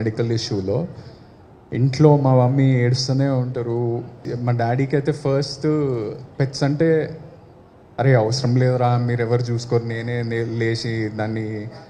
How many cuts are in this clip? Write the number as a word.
one